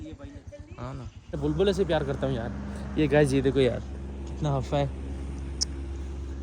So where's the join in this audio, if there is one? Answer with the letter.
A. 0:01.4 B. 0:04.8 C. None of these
A